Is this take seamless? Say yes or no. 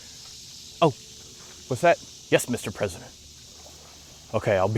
yes